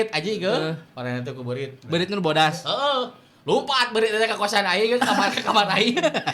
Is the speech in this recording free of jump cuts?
yes; 0 cuts

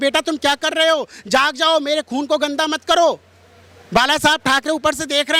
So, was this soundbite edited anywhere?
no; 0 cuts

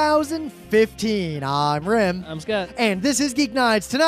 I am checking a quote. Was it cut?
no; 0 cuts

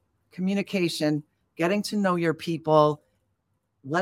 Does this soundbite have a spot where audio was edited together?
no; 0 cuts

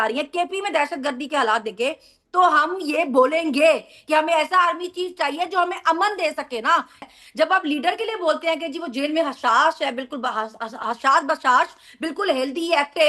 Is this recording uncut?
no; 1 cut; at 7.0 s

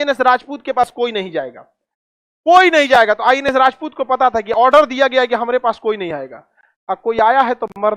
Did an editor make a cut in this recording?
no; 0 cuts

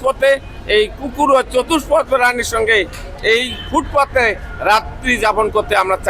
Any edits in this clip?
no; 0 cuts

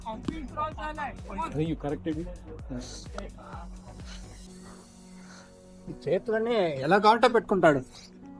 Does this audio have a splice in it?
no; 0 cuts

